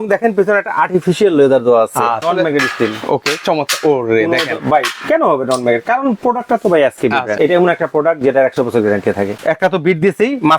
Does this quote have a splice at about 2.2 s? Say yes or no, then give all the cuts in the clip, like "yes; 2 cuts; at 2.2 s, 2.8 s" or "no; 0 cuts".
yes; 3 cuts; at 2.2 s, 7.4 s, 9.3 s